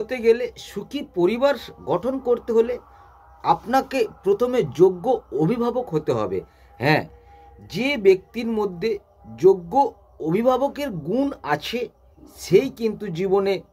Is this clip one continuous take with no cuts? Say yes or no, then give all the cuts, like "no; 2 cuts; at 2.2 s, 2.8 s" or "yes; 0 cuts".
yes; 0 cuts